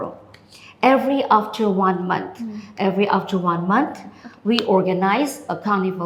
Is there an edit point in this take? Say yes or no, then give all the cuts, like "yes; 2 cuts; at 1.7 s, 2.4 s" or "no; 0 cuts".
no; 0 cuts